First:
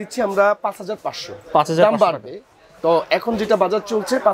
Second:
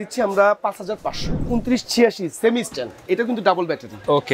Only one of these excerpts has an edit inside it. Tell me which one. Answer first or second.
second